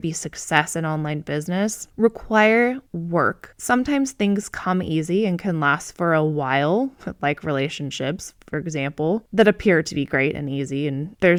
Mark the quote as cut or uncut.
uncut